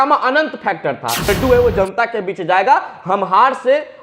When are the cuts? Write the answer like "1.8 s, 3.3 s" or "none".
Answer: 1.3 s